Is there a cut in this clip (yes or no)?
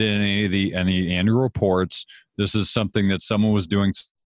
no